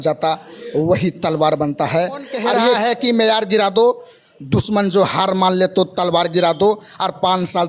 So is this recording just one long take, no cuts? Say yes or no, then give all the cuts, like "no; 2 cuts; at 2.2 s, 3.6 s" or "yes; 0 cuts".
no; 1 cut; at 2.8 s